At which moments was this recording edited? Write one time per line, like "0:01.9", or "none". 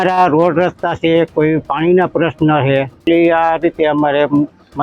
0:03.0